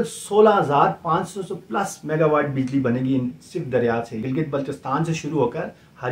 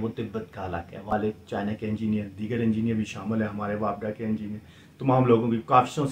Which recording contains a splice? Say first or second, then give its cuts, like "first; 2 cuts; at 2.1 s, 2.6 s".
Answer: second; 1 cut; at 1.1 s